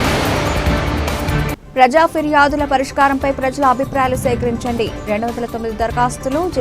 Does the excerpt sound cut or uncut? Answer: cut